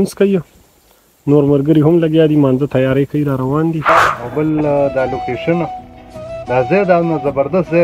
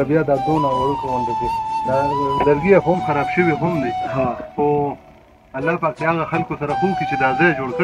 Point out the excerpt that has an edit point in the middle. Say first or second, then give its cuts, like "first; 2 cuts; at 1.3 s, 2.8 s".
first; 1 cut; at 4.2 s